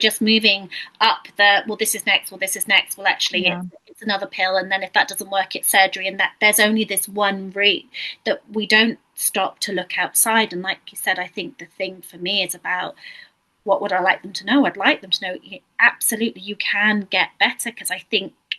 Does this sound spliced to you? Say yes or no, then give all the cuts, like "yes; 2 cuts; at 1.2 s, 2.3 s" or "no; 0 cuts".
no; 0 cuts